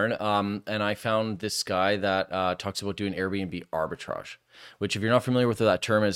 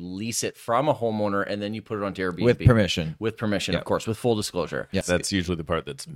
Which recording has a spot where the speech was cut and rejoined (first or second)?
second